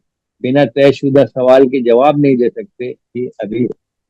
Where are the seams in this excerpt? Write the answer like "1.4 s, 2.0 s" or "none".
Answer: 3.2 s